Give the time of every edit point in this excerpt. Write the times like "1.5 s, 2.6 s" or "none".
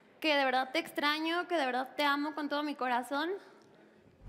none